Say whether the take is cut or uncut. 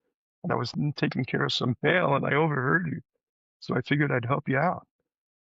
uncut